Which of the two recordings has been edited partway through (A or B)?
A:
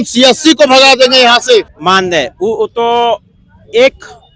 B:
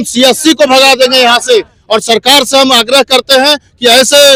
A